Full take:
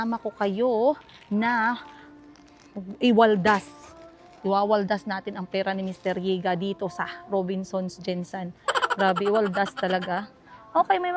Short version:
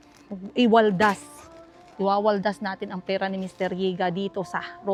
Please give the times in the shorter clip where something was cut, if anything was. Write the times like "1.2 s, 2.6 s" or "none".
none